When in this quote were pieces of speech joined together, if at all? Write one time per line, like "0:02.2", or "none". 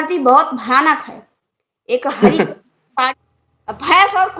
0:03.1